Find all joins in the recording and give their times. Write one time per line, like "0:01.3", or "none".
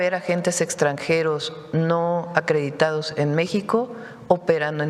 none